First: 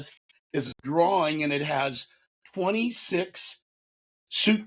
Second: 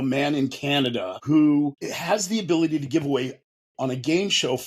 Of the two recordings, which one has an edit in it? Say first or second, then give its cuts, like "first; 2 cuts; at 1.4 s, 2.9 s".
second; 2 cuts; at 1.1 s, 1.9 s